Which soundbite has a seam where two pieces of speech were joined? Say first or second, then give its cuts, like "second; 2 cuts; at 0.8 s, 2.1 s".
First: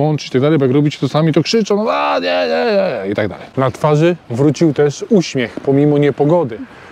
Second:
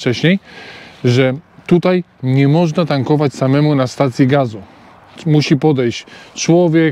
first; 1 cut; at 3.4 s